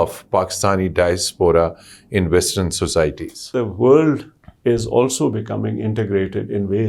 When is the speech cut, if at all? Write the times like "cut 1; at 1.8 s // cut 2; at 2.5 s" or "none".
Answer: cut 1; at 3.5 s